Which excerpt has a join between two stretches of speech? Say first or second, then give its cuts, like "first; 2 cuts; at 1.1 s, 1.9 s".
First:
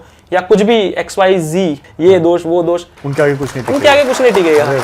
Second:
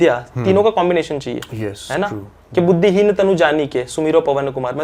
first; 2 cuts; at 1.8 s, 3.0 s